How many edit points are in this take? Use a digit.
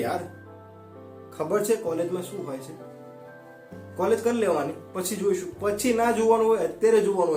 0